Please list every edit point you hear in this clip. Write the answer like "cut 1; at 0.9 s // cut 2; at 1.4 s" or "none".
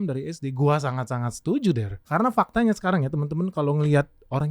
cut 1; at 1.9 s